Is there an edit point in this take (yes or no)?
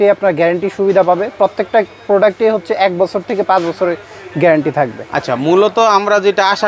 no